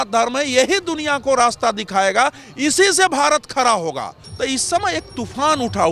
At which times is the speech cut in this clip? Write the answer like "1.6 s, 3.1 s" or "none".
4.2 s